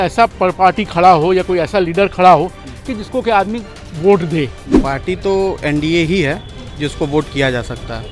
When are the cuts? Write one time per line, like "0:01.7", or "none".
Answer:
0:04.7